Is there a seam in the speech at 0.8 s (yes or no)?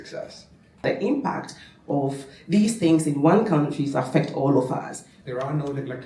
yes